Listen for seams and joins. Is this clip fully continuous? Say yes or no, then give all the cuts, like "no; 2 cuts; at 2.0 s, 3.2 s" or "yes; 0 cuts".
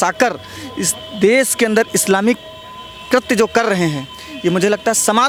yes; 0 cuts